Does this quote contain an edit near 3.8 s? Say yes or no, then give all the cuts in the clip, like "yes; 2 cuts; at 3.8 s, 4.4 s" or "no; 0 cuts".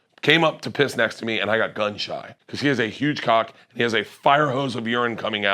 no; 1 cut; at 2.3 s